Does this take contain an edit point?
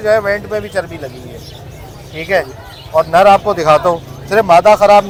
no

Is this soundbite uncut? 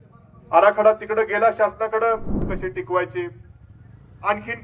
no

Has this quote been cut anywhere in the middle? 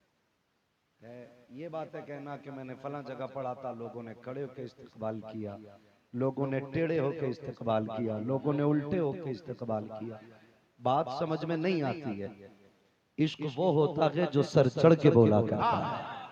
no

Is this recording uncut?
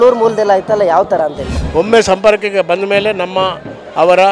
no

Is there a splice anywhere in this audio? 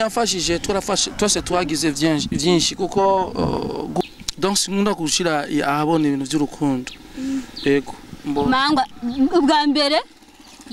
yes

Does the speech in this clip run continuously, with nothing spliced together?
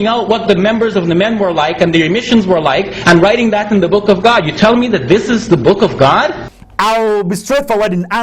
no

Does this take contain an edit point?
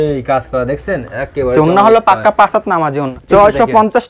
yes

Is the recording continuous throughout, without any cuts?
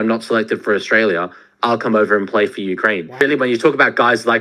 no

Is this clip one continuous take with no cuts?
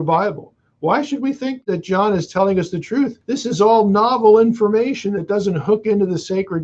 no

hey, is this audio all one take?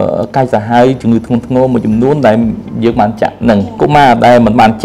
no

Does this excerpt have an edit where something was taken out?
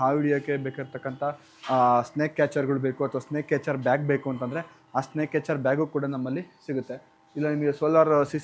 no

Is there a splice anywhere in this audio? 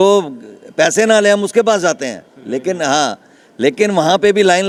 no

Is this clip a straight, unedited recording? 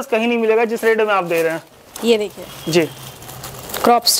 no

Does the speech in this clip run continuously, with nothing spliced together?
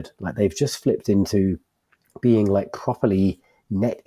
yes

